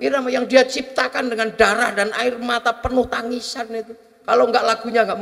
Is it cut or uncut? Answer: uncut